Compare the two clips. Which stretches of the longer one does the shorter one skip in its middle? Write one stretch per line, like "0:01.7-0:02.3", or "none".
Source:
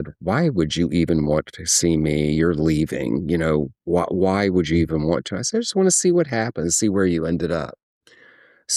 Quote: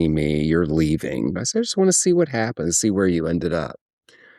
0:03.2-0:05.3